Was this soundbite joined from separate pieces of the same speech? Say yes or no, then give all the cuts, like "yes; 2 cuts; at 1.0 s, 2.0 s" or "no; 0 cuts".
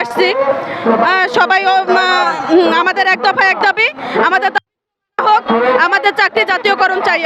no; 0 cuts